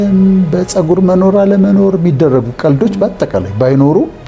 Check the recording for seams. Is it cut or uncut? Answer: uncut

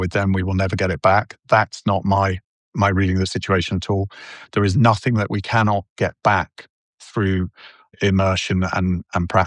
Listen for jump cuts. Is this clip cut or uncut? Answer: uncut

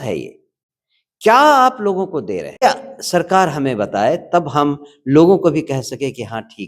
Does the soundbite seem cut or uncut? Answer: cut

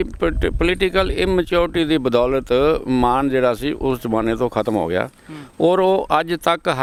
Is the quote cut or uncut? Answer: uncut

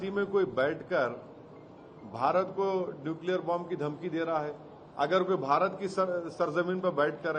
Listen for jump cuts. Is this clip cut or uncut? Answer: uncut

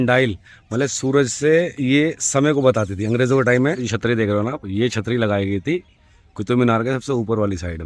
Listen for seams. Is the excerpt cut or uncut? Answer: cut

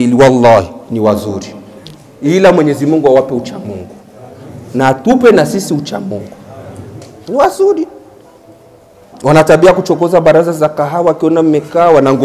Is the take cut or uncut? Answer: uncut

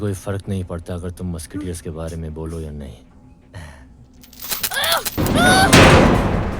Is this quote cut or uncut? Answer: cut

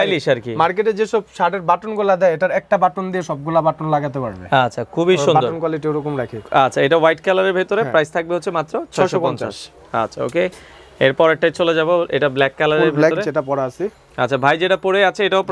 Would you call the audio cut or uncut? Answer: uncut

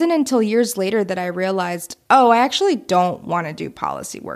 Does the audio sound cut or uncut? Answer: uncut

